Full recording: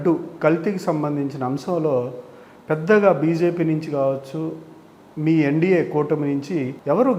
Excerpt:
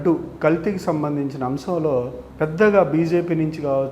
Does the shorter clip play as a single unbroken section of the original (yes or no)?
no